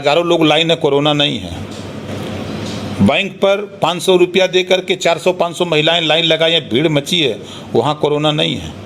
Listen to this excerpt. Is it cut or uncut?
uncut